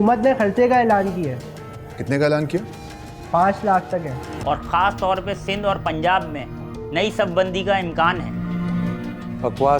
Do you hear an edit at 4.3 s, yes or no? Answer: yes